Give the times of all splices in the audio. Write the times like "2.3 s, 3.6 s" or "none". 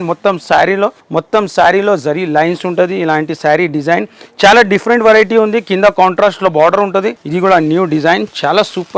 1.0 s, 7.2 s